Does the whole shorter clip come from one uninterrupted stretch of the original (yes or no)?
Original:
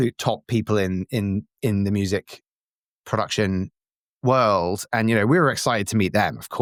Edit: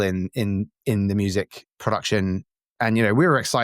no